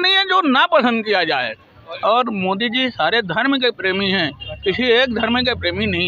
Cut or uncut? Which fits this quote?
cut